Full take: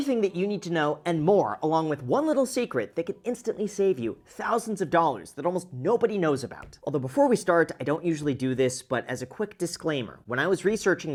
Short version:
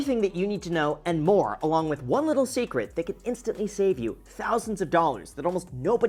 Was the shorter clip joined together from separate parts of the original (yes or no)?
no